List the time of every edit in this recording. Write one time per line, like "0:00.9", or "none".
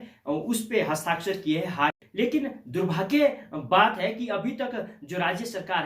0:02.0